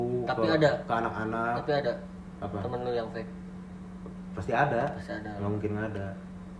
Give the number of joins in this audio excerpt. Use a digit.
0